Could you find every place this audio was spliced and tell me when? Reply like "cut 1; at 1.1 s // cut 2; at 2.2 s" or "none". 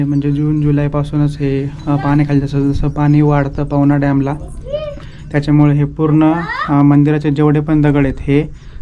none

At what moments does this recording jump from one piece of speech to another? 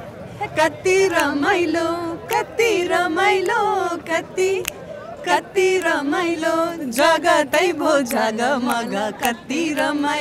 none

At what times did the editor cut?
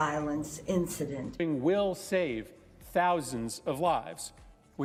none

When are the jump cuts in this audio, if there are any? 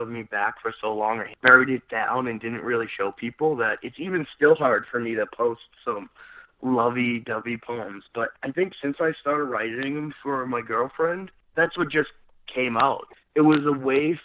cut 1; at 1.4 s

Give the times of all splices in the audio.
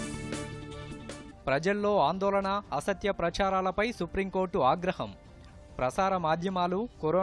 cut 1; at 1.1 s

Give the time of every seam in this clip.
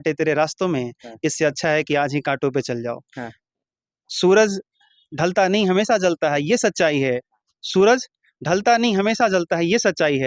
none

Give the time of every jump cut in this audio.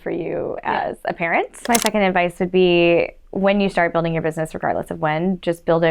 cut 1; at 1.6 s

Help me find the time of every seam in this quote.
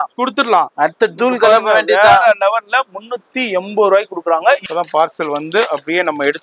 cut 1; at 4.7 s

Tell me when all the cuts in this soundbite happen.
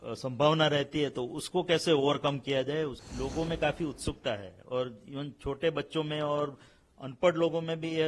cut 1; at 3.0 s

